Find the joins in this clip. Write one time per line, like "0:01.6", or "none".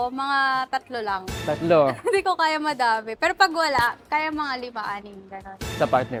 none